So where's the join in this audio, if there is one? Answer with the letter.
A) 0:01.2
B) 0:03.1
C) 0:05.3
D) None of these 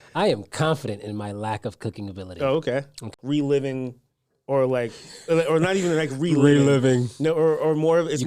B